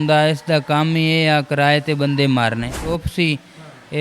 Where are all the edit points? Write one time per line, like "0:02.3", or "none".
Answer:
0:02.9

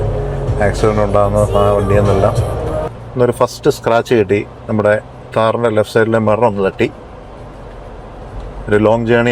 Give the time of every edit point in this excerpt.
0:02.9

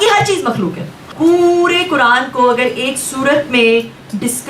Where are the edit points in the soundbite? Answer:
0:01.1

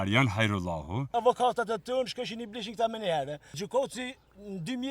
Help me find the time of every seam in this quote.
0:01.1
0:03.6

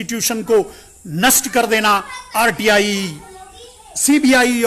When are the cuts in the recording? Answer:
none

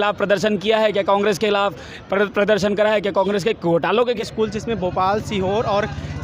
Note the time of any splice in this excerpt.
0:04.0

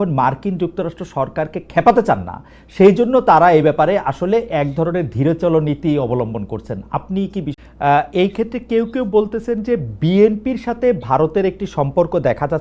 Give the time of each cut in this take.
0:07.5

